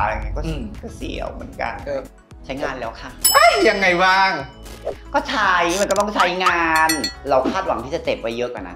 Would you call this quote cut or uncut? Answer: cut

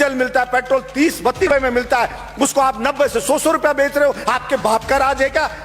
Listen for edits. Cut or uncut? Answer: cut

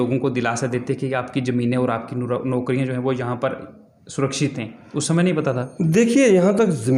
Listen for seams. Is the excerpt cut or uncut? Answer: uncut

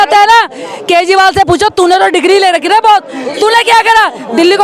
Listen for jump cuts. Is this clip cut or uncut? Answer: uncut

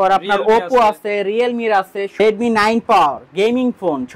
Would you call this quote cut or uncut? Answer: cut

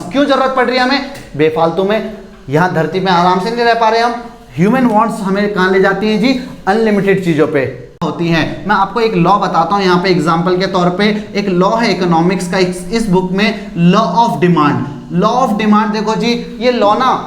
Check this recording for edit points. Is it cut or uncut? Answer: cut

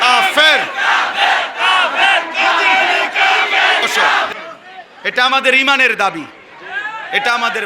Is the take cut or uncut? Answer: cut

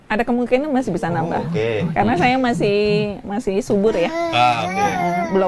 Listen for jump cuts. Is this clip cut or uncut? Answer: uncut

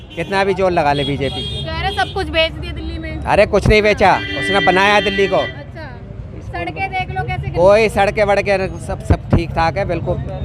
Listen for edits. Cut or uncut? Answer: uncut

